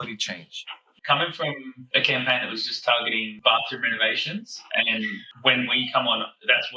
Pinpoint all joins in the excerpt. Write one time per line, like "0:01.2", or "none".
0:00.9
0:01.8
0:03.3